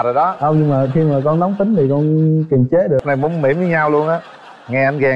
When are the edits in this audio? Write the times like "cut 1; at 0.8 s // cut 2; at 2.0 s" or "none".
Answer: cut 1; at 3.0 s